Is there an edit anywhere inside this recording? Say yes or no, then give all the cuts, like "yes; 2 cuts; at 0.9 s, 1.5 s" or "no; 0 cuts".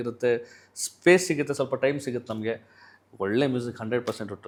no; 0 cuts